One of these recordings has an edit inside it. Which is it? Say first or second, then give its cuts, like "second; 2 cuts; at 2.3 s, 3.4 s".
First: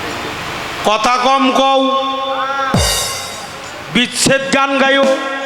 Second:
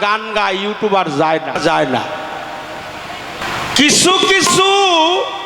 second; 2 cuts; at 1.6 s, 3.4 s